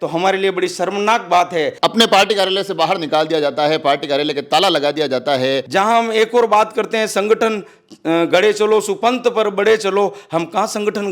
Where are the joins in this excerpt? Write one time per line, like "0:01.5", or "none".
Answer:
0:01.7
0:05.6